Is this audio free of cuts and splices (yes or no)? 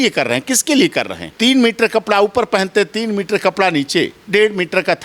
no